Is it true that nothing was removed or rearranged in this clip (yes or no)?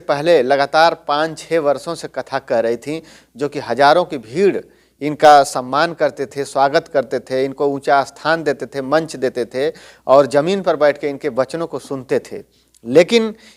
yes